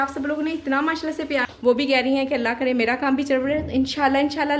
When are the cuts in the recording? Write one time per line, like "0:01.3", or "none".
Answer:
0:01.4